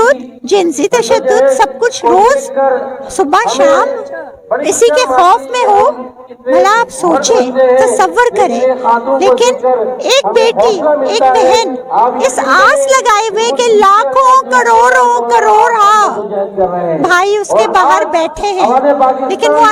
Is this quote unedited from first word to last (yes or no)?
yes